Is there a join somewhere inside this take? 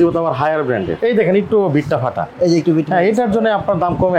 yes; 1 cut; at 0.9 s

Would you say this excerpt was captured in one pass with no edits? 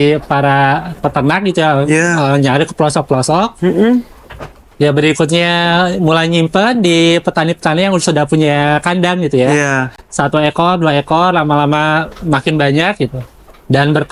yes; 0 cuts

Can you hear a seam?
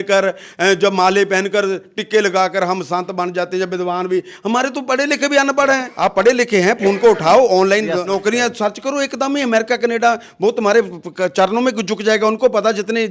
yes; 2 cuts; at 5.9 s, 8.1 s

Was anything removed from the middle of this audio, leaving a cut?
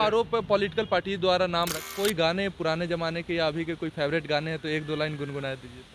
yes; 1 cut; at 1.8 s

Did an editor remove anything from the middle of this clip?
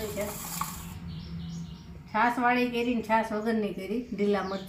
no; 0 cuts

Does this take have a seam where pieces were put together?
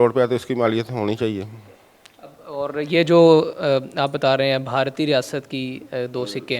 no; 0 cuts

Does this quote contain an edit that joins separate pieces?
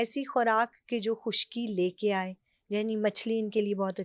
no; 0 cuts

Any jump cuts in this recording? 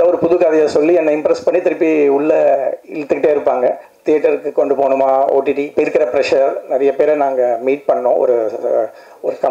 yes; 1 cut; at 3.9 s

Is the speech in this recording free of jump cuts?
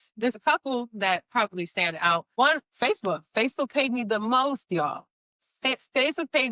yes; 0 cuts

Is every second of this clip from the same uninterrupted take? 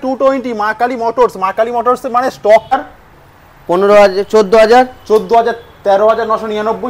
no; 1 cut; at 2.7 s

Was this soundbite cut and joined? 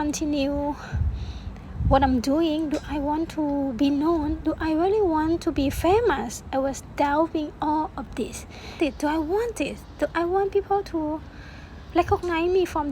yes; 1 cut; at 8.8 s

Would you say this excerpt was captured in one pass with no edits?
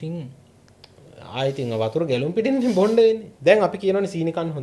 no; 1 cut; at 3.3 s

